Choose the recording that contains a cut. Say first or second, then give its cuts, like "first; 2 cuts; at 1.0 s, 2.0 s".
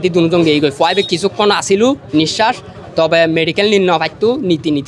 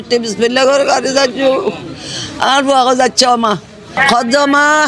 second; 1 cut; at 3.9 s